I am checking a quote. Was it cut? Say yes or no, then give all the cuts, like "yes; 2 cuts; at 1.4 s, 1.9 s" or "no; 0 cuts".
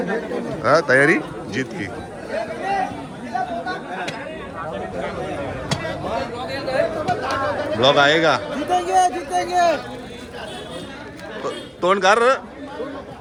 no; 0 cuts